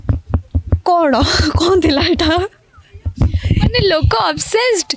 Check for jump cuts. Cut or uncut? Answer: uncut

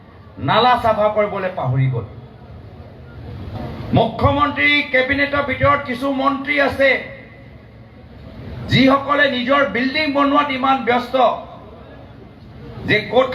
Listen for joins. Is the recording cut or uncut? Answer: cut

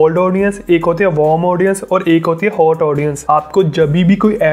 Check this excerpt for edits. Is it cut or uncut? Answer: cut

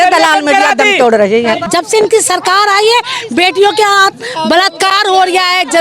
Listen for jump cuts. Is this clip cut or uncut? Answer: cut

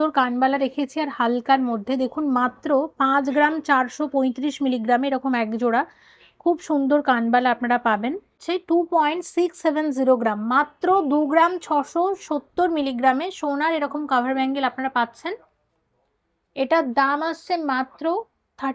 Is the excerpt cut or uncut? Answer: cut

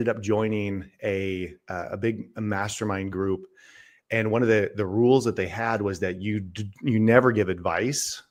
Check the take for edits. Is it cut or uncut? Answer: uncut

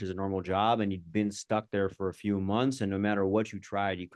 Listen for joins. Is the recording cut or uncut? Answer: uncut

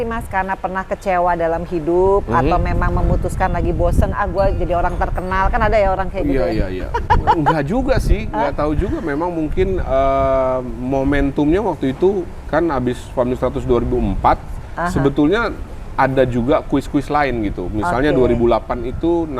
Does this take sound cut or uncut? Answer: uncut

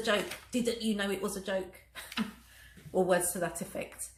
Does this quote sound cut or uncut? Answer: uncut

